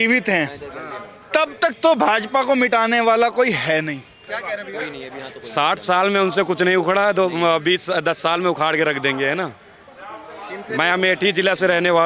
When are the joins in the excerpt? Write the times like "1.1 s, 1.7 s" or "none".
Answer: none